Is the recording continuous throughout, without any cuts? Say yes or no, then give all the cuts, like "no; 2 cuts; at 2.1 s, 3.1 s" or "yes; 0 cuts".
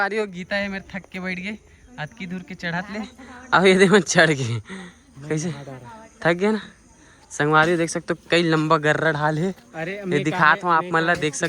yes; 0 cuts